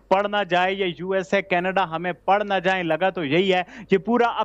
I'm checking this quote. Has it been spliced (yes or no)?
no